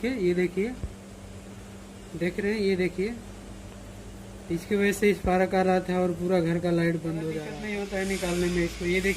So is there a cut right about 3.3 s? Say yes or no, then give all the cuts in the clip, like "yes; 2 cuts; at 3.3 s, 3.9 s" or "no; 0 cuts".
no; 1 cut; at 7.5 s